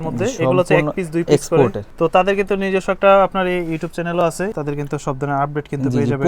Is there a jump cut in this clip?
yes; 2 cuts; at 1.8 s, 4.5 s

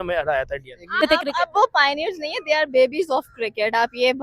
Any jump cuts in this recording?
yes; 1 cut; at 1.0 s

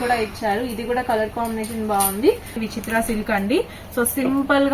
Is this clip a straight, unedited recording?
no; 1 cut; at 2.6 s

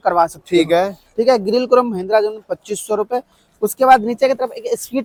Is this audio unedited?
yes; 0 cuts

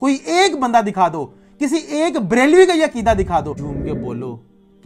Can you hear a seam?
yes; 1 cut; at 3.6 s

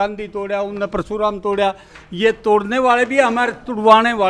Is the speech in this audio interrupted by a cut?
no; 0 cuts

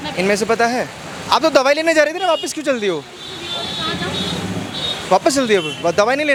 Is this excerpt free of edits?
yes; 0 cuts

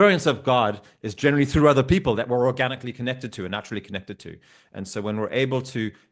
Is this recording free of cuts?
yes; 0 cuts

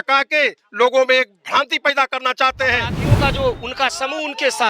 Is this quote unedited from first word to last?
no; 1 cut; at 3.0 s

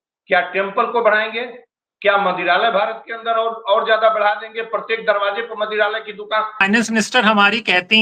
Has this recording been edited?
yes; 1 cut; at 6.6 s

